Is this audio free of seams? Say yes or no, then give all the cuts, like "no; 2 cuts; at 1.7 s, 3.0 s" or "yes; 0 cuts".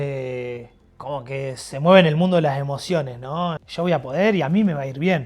no; 1 cut; at 3.6 s